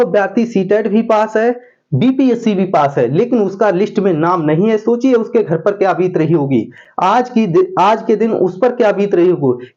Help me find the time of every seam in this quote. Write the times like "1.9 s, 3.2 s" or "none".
none